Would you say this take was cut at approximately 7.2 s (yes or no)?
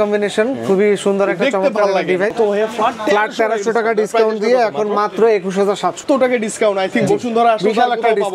no